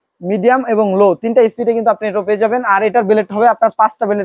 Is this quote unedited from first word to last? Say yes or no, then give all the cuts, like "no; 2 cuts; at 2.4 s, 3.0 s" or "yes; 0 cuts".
yes; 0 cuts